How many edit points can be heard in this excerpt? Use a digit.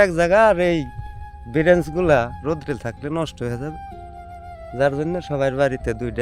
1